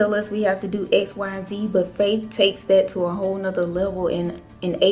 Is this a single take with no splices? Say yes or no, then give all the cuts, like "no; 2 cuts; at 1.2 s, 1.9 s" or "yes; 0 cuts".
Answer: yes; 0 cuts